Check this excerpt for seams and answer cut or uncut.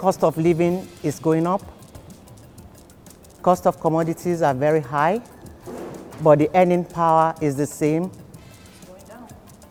uncut